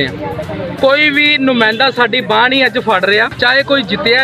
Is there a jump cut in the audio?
yes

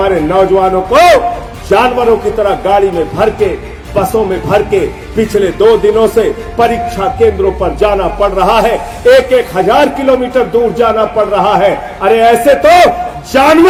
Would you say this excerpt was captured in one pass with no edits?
yes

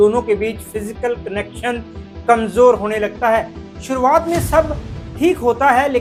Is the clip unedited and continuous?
yes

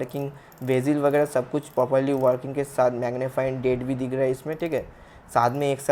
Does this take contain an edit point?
no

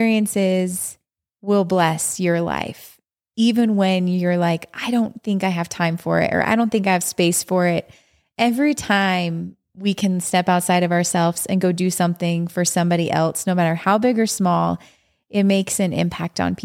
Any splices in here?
no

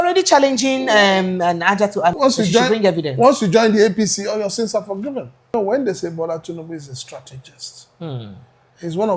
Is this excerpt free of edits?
no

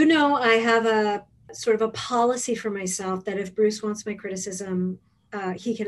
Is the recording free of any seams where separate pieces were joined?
no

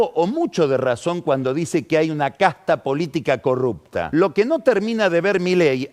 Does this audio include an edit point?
yes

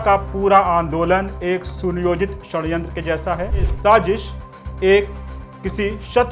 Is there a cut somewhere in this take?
yes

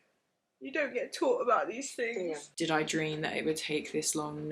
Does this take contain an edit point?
yes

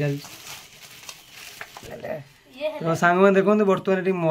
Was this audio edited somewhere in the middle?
yes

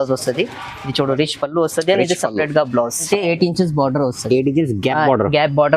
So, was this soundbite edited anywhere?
yes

